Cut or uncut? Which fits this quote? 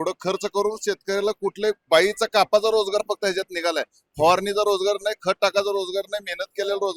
uncut